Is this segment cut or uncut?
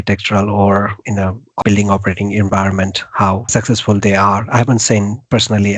cut